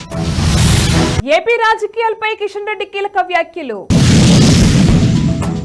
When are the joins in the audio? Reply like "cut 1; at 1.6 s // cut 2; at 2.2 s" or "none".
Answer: cut 1; at 1.1 s